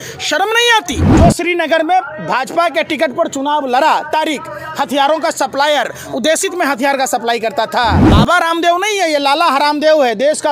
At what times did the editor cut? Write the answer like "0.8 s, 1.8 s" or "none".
1.1 s, 8.1 s